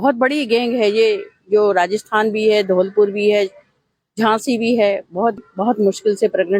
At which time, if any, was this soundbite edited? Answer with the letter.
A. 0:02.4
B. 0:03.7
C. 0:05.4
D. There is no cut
C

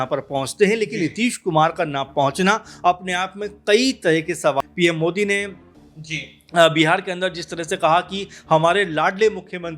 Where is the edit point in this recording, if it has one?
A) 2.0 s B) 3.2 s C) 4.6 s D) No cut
C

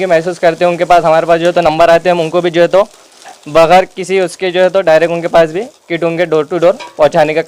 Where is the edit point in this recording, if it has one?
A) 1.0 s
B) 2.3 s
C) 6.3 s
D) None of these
D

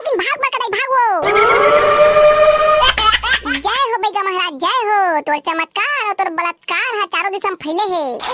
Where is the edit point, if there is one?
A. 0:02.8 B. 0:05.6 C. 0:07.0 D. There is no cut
A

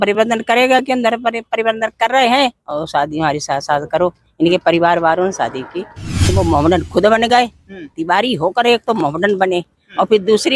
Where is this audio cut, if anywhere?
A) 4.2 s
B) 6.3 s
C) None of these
B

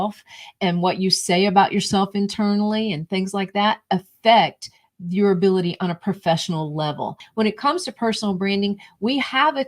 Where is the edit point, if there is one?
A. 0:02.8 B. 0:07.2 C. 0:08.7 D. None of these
B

